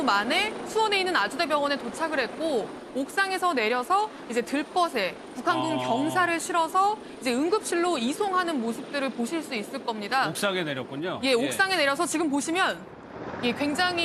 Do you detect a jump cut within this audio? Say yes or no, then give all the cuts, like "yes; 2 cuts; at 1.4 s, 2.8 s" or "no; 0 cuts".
no; 0 cuts